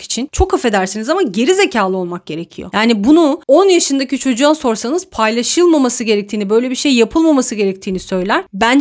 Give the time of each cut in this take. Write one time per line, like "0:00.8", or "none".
none